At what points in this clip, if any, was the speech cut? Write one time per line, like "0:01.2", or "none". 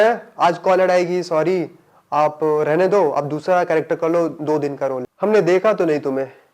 0:05.1